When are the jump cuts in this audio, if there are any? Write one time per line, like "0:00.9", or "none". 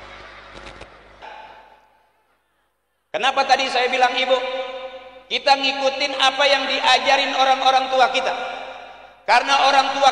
0:01.2